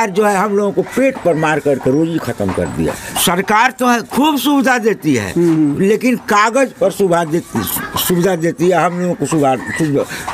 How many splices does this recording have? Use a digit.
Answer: 1